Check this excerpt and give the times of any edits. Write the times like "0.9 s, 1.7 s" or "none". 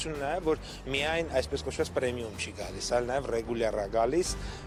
none